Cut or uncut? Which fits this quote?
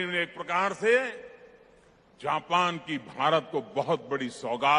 uncut